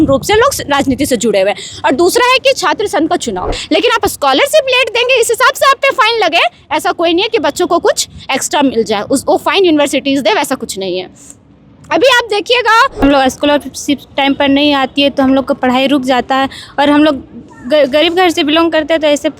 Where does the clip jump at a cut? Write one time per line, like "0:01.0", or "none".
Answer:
0:03.5
0:13.0